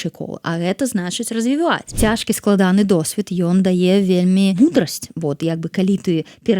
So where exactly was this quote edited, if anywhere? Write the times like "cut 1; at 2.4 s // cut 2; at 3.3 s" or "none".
cut 1; at 1.9 s // cut 2; at 4.5 s